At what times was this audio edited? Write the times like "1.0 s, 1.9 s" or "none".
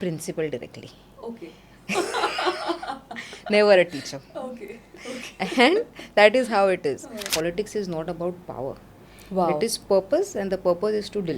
7.3 s